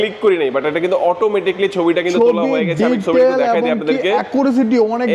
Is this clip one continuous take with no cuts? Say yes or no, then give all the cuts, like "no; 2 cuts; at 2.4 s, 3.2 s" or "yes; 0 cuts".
yes; 0 cuts